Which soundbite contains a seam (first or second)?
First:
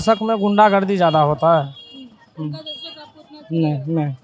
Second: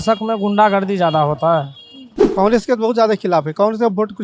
second